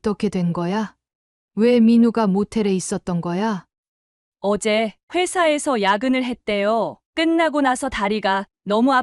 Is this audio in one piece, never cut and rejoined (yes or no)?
no